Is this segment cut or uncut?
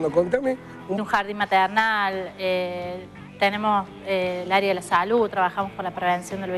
uncut